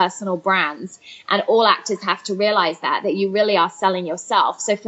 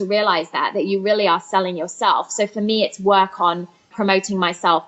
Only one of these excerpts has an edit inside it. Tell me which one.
second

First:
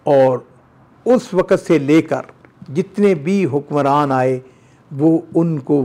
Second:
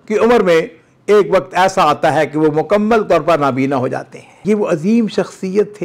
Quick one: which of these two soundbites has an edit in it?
second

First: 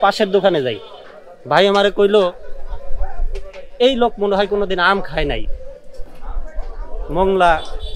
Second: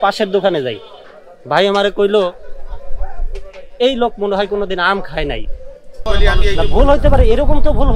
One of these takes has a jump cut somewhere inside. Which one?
second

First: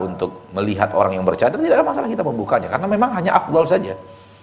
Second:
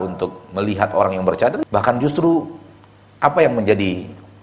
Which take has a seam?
second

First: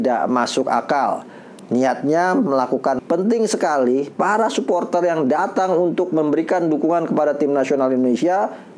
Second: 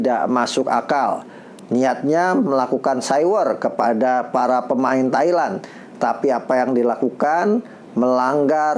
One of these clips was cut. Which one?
first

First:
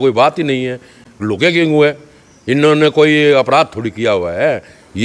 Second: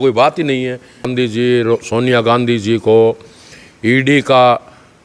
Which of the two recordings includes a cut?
second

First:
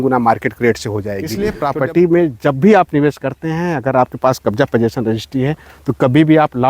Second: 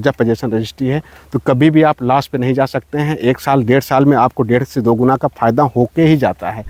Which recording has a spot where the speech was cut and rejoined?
first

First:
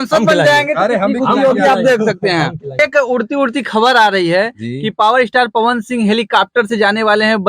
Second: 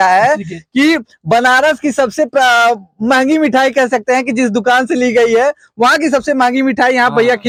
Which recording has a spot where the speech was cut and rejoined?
first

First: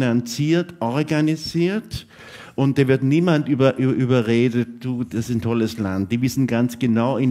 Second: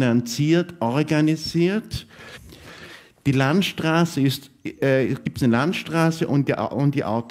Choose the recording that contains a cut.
first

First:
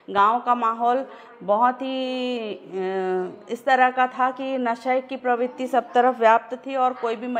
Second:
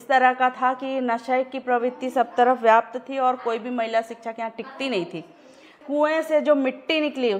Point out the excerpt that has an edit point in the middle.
second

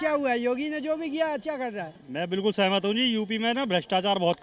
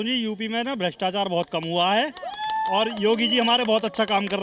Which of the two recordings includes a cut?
first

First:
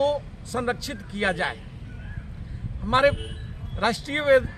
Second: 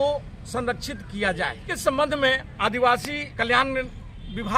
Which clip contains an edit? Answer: second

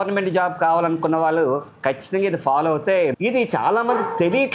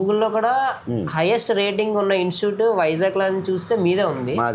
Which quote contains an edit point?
first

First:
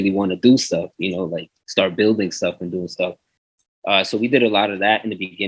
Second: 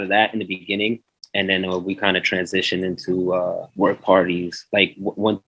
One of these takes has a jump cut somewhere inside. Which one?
second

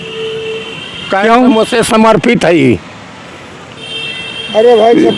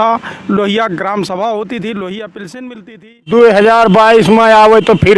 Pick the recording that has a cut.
second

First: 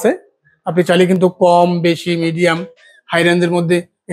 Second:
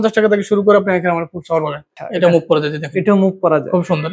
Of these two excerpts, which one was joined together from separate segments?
second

